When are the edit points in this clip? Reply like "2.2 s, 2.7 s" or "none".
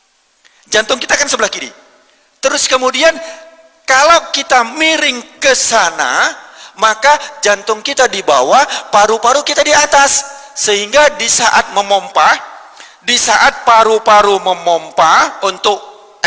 none